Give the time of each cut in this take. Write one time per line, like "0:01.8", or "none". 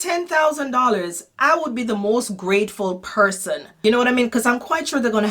0:03.7